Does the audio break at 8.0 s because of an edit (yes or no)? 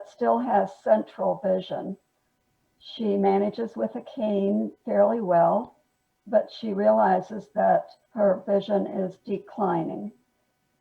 yes